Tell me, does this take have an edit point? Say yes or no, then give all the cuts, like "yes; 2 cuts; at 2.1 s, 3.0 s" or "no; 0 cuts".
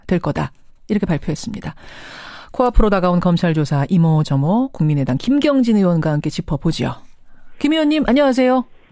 no; 0 cuts